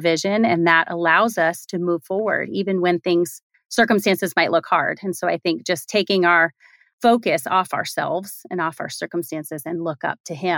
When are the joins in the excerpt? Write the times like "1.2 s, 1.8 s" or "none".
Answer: none